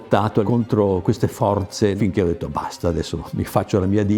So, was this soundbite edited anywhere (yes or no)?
no